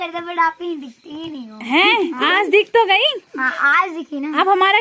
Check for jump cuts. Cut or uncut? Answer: uncut